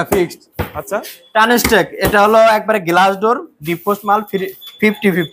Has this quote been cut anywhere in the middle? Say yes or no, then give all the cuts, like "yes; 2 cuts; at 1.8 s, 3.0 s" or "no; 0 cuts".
no; 0 cuts